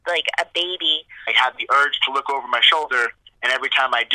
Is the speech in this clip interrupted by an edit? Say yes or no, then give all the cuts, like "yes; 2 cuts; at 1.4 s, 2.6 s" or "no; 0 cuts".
yes; 1 cut; at 1.3 s